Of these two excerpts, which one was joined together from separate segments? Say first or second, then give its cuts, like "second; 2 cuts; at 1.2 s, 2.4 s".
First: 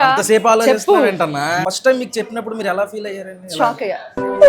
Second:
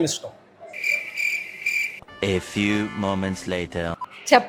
first; 1 cut; at 1.6 s